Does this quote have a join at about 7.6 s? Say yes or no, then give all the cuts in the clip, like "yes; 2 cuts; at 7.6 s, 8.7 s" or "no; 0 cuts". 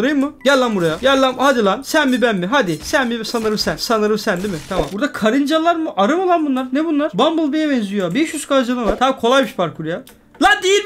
no; 2 cuts; at 4.9 s, 8.9 s